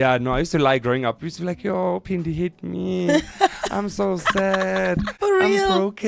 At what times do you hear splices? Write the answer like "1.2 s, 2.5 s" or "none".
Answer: 5.1 s